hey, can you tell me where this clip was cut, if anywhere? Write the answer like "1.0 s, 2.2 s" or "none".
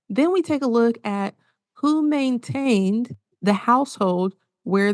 3.2 s